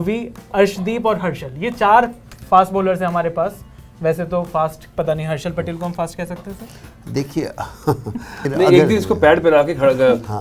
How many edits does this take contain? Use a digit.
1